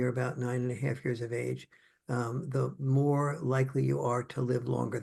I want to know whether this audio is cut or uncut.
uncut